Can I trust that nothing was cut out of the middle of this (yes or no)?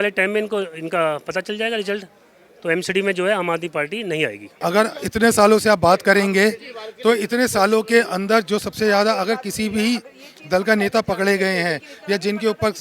no